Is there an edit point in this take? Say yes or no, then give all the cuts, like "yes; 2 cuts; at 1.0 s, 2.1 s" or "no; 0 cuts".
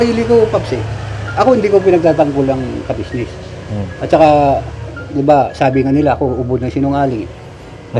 no; 0 cuts